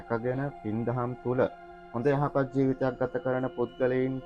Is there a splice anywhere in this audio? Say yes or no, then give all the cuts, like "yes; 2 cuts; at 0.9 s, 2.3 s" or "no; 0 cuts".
no; 0 cuts